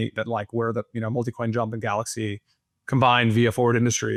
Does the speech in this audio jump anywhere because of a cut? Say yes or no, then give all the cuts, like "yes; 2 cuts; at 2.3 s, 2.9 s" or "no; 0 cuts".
no; 0 cuts